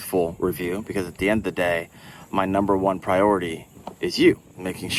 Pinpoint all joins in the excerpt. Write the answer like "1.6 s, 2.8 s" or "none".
none